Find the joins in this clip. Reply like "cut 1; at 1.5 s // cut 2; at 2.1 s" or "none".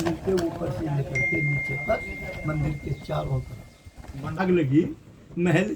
cut 1; at 4.3 s